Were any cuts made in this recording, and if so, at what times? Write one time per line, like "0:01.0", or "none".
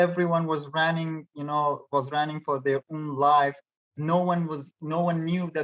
none